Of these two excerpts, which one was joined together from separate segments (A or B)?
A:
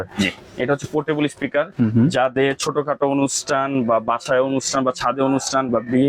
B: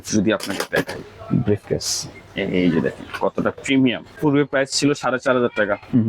B